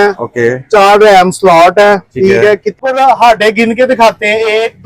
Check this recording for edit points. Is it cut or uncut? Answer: cut